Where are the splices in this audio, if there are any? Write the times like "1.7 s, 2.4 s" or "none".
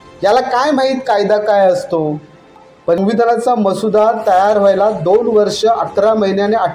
3.0 s